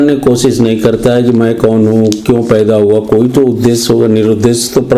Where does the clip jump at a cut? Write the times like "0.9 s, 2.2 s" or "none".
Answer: none